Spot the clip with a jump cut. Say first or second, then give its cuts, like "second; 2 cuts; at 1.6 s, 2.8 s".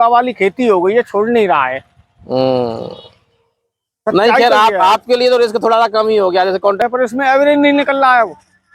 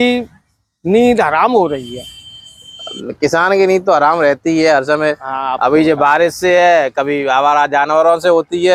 first; 1 cut; at 6.8 s